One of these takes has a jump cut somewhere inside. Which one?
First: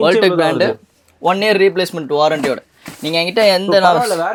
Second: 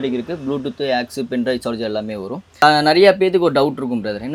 second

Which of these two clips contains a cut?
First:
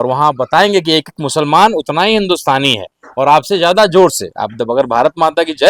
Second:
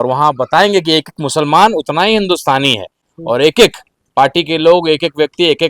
second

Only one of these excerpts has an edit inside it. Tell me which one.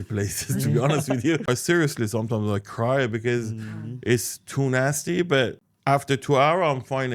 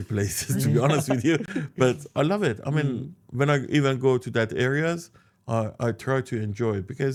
first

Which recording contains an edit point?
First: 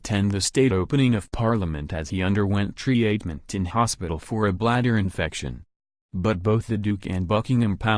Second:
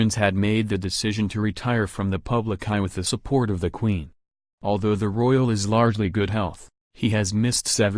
second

